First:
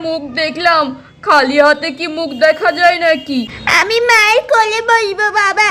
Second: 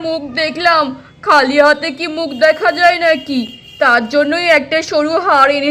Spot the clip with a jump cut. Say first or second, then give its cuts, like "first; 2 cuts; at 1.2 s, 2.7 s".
first; 1 cut; at 3.6 s